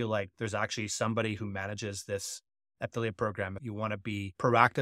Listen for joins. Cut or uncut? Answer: cut